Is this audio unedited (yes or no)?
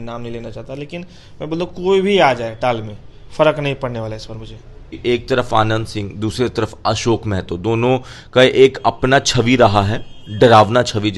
no